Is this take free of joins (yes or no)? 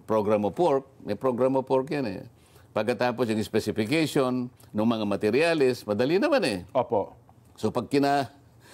yes